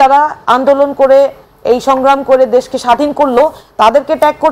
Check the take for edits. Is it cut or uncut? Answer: uncut